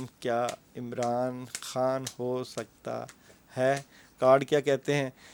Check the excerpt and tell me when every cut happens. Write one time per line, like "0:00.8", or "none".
none

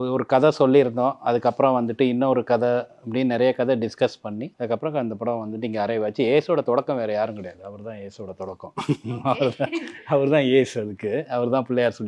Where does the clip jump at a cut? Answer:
0:04.5

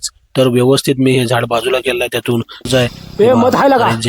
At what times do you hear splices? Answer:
0:02.7

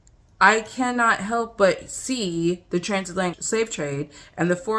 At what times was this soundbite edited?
0:03.4

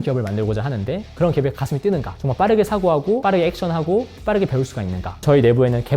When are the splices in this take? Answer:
0:01.0
0:02.2
0:05.2

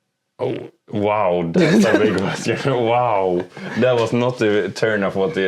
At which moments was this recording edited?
none

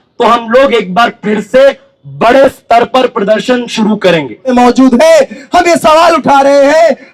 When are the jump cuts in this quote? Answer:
0:04.5

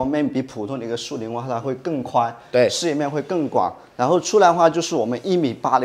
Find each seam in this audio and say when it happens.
none

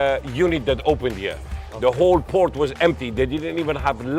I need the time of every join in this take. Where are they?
none

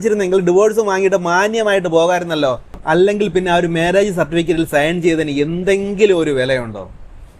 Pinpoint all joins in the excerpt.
none

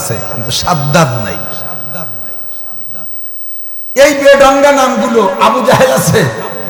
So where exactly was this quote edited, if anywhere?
none

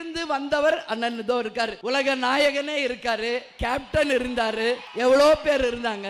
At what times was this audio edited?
0:01.8
0:04.9

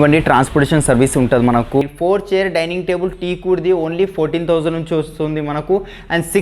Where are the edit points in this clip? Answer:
0:01.8

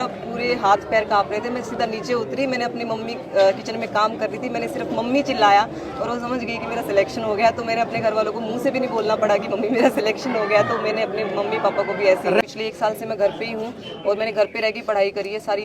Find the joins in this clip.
0:12.4

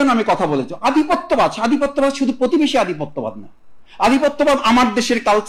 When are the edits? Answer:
none

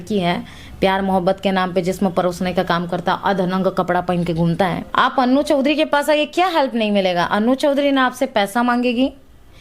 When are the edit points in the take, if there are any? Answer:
0:04.8

